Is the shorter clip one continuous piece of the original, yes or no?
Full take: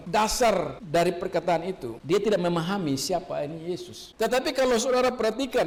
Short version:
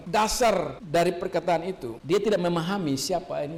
yes